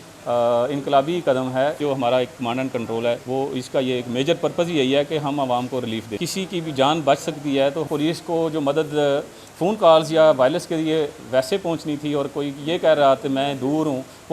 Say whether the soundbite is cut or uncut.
cut